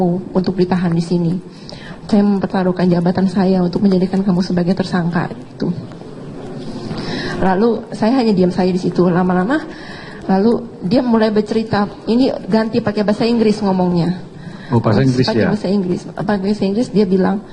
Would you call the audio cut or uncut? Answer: cut